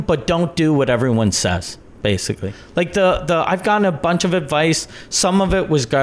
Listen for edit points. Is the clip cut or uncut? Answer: cut